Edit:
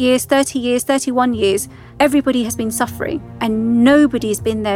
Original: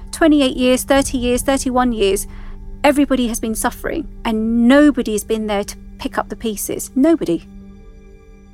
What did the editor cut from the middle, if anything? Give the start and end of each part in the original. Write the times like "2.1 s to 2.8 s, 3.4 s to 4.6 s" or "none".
2.4 s to 2.6 s